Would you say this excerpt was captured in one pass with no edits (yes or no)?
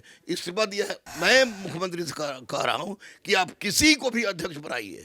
no